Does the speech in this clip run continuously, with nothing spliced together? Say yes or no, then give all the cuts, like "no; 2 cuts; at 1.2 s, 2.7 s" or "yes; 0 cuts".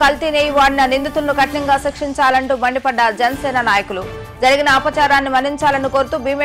yes; 0 cuts